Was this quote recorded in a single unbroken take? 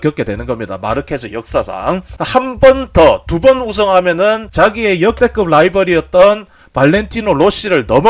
no; 1 cut; at 2.1 s

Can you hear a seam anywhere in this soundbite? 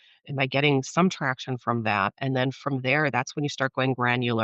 no; 0 cuts

